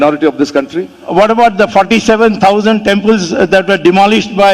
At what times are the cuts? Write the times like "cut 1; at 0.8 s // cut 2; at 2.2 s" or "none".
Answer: cut 1; at 1.1 s